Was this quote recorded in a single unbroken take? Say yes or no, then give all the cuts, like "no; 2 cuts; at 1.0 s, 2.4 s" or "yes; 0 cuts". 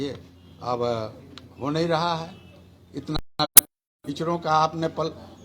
yes; 0 cuts